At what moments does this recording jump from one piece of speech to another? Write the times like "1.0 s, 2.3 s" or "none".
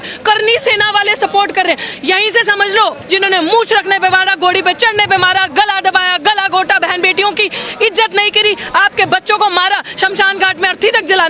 3.0 s